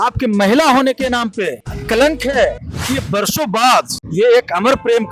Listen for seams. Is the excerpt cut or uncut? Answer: cut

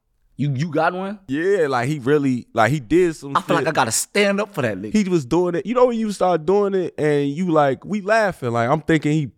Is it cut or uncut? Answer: cut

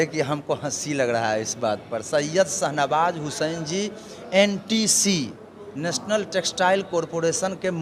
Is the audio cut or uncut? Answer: uncut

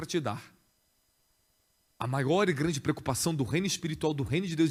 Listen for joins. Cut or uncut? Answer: uncut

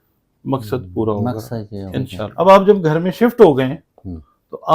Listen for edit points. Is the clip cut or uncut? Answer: cut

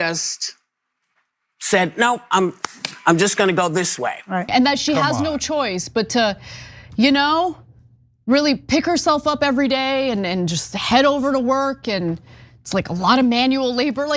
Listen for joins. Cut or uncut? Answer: cut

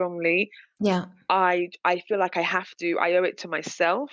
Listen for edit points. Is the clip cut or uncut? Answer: uncut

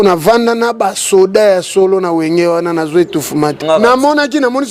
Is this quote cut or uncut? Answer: cut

